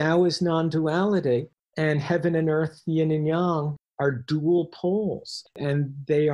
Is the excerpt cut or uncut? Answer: cut